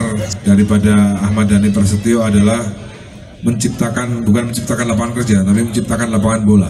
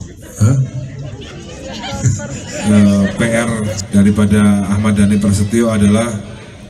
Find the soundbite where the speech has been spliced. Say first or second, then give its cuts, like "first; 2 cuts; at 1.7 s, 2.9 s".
second; 1 cut; at 2.5 s